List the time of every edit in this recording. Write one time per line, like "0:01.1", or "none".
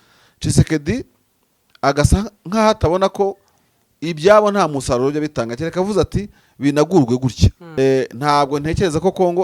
0:07.6

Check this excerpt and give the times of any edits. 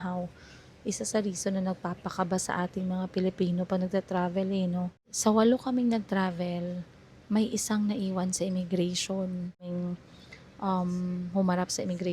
0:05.0
0:09.7

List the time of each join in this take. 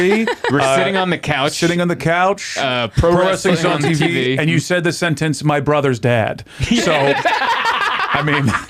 none

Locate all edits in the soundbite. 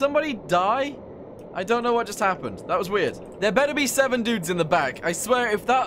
0:03.3

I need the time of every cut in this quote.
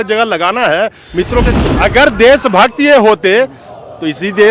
0:01.5

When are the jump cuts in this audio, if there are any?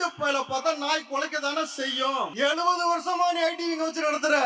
0:02.3

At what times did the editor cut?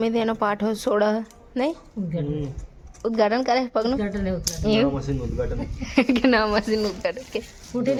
none

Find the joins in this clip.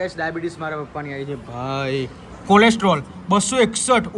0:02.4

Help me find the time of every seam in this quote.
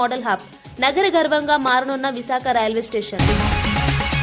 0:03.2

